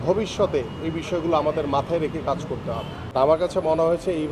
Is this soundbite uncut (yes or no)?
no